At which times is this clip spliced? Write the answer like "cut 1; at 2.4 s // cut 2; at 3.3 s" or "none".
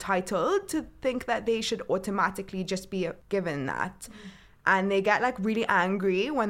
cut 1; at 3.2 s